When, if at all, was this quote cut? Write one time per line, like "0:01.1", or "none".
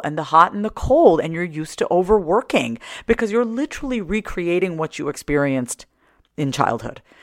none